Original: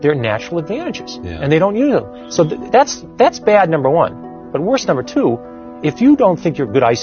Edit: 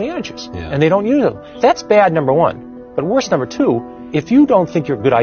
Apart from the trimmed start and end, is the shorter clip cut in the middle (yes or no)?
yes